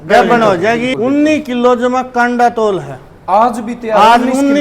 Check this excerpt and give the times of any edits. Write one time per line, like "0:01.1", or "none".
0:00.9